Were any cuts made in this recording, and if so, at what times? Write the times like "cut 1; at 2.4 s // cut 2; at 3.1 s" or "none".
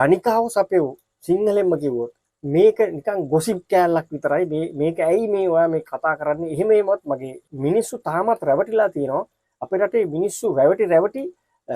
cut 1; at 2.2 s // cut 2; at 7.4 s